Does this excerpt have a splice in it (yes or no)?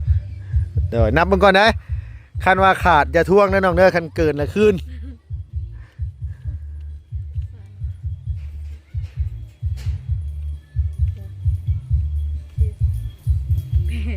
no